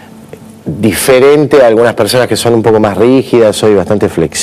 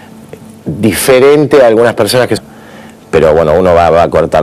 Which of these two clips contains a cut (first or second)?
first